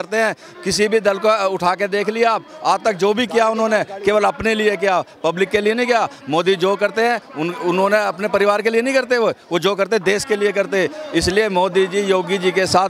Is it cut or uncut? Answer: uncut